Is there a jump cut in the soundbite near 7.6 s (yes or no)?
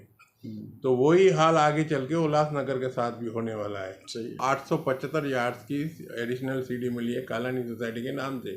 no